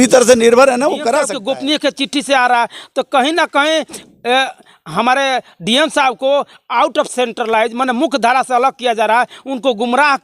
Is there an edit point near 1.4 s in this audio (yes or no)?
yes